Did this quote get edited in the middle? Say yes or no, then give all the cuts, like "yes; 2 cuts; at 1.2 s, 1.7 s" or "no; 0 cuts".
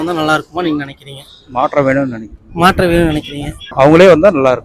yes; 1 cut; at 3.6 s